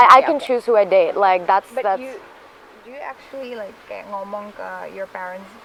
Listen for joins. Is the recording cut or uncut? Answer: uncut